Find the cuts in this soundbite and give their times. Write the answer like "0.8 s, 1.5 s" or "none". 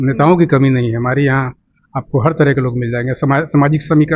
none